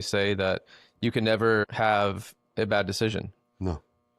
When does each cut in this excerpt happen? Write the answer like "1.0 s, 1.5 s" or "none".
1.7 s